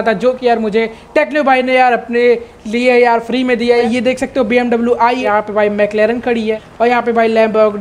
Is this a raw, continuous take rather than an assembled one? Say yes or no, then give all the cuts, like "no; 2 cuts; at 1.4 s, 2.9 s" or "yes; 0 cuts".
no; 3 cuts; at 3.8 s, 5.3 s, 6.6 s